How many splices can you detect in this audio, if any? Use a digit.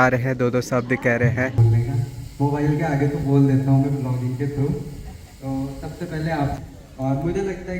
2